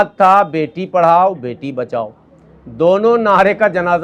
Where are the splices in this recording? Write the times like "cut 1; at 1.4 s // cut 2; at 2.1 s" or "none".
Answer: none